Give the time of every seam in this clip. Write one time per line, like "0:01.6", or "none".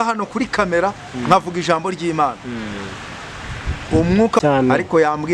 0:04.4